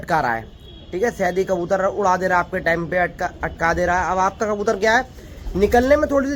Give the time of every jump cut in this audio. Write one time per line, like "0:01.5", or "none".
none